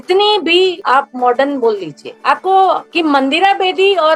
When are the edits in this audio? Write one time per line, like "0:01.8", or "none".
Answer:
0:02.8